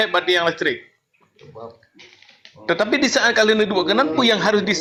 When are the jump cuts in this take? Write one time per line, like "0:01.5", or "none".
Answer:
none

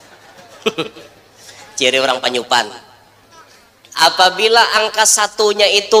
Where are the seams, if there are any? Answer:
0:04.0

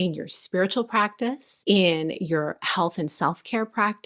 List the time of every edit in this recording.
0:01.5

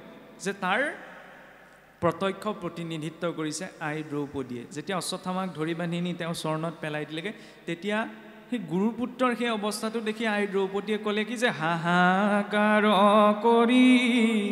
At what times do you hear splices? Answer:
none

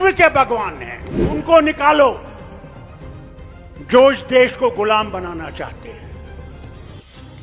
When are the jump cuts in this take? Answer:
0:01.3
0:02.3
0:03.8

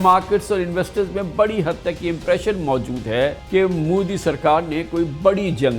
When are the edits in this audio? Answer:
0:03.4

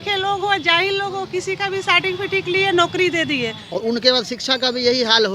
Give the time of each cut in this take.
0:03.6

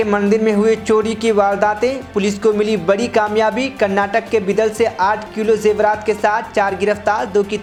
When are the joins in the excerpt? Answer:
none

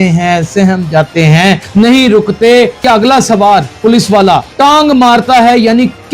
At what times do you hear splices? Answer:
0:01.6
0:02.8
0:04.1

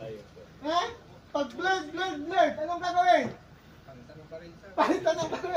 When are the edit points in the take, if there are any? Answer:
none

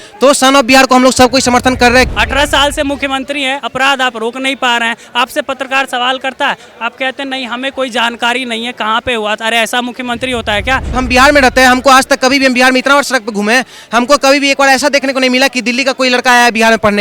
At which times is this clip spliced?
0:02.1
0:10.9

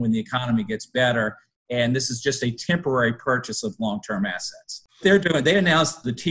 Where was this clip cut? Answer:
0:04.8

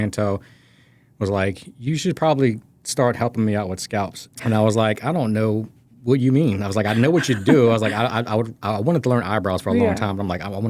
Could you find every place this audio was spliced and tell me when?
0:04.2

